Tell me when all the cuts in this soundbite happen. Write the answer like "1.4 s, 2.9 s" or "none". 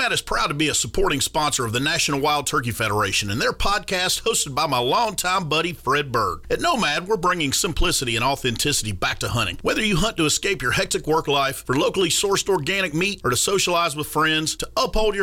none